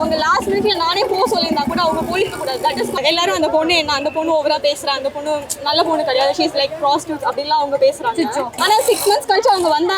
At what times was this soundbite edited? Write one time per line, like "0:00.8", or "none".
0:03.0
0:08.6

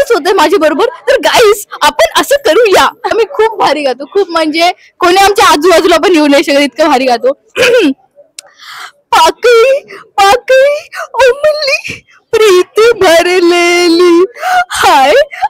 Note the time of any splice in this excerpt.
0:03.1
0:07.5

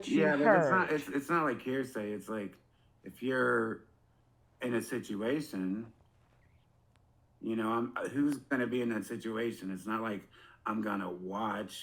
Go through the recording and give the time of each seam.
none

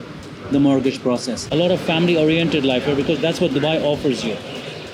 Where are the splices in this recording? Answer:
0:01.4

